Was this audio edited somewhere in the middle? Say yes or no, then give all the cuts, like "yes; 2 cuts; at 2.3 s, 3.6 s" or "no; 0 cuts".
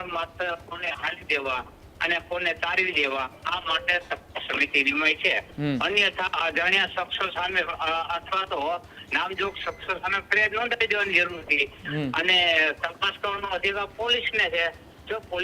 no; 0 cuts